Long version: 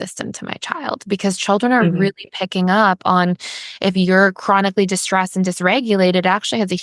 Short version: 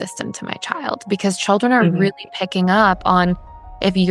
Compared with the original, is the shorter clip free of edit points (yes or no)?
yes